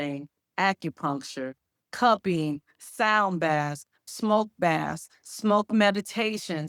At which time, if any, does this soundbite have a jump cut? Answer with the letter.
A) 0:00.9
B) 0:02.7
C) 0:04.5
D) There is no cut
D